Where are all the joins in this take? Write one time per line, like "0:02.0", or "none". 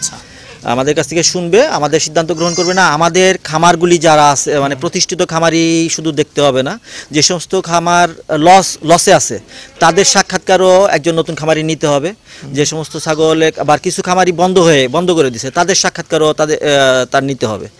none